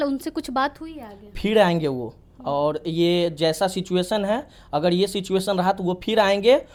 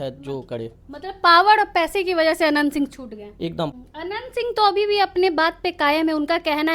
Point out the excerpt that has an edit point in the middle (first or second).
second